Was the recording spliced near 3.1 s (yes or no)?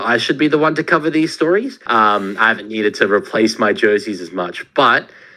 no